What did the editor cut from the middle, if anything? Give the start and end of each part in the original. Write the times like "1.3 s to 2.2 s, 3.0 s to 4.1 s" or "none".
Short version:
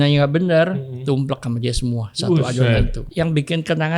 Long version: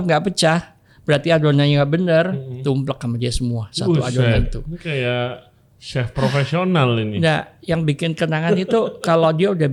4.6 s to 7.5 s